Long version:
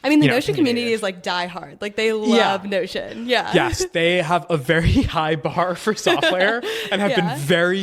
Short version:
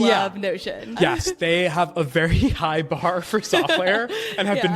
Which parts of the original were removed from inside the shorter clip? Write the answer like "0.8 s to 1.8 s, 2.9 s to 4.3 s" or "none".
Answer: 3.2 s to 3.5 s